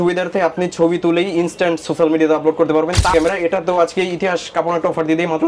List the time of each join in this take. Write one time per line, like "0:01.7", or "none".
0:03.1

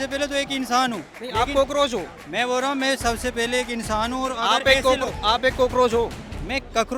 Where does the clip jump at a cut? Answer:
none

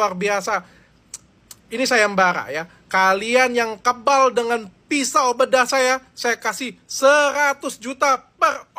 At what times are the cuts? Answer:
none

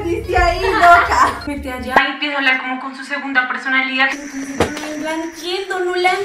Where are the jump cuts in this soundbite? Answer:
0:01.4

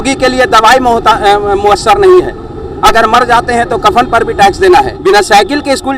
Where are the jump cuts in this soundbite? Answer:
0:04.9

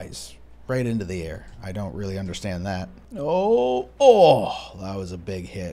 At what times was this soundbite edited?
0:03.0

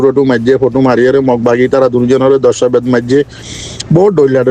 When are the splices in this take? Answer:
none

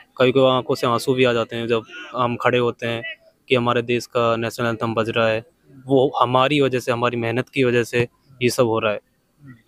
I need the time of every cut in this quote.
none

